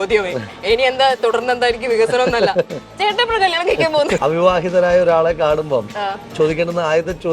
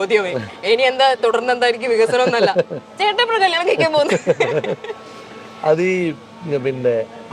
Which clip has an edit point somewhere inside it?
first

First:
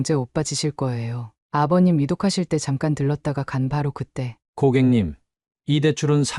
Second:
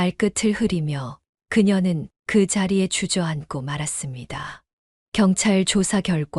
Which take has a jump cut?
first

